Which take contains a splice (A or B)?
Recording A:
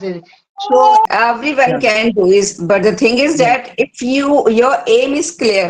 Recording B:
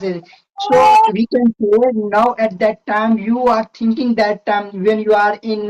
A